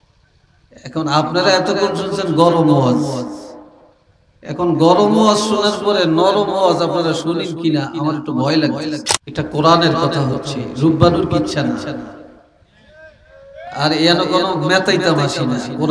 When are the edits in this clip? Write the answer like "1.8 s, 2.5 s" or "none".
9.1 s